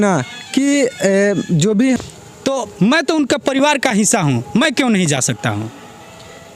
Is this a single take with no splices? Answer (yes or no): no